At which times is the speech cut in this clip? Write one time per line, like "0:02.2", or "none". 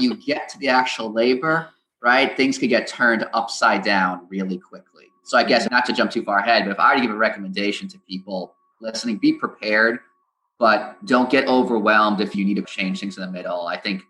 0:05.7
0:12.7